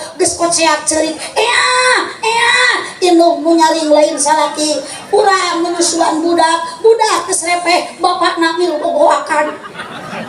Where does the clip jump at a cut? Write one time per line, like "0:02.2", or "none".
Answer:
none